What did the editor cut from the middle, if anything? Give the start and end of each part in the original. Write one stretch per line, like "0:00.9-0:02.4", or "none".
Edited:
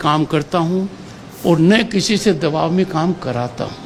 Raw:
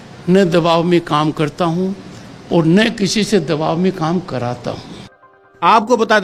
none